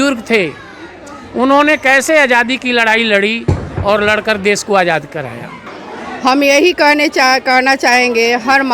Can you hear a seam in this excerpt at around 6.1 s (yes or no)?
yes